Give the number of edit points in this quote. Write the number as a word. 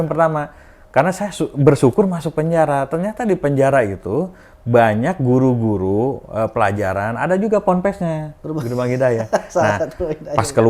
one